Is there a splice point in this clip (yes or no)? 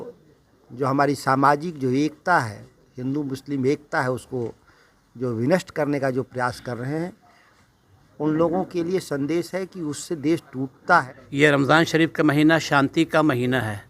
yes